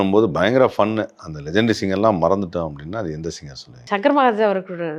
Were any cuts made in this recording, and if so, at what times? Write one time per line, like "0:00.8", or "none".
0:03.8